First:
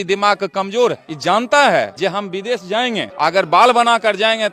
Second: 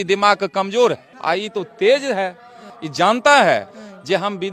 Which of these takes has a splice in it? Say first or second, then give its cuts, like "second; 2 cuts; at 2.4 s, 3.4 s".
first; 3 cuts; at 1.1 s, 1.9 s, 3.1 s